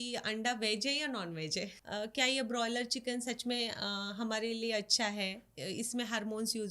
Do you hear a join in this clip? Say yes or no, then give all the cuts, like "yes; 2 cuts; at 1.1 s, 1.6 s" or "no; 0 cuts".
yes; 1 cut; at 1.8 s